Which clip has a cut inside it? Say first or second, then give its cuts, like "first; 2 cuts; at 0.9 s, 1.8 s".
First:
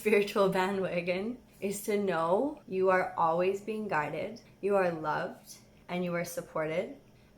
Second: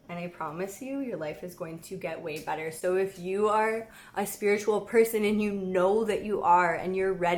first; 2 cuts; at 1.4 s, 2.6 s